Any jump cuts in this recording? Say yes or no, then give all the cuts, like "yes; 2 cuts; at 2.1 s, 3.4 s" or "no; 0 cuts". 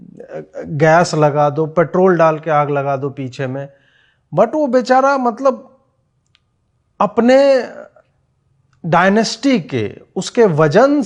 no; 0 cuts